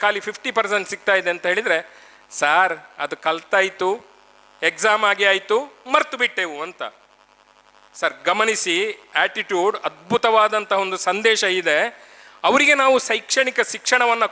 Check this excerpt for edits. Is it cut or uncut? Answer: uncut